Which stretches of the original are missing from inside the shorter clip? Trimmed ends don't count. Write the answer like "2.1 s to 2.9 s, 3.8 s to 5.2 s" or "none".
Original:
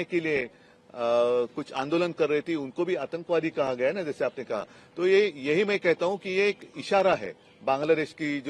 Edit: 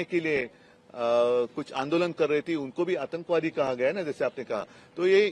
none